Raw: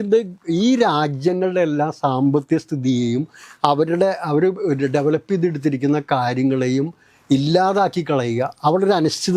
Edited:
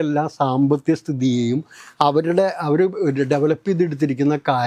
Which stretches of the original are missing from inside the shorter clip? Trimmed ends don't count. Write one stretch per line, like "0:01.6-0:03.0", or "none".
none